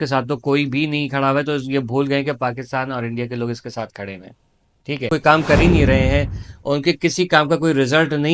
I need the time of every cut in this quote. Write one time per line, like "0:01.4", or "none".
0:05.1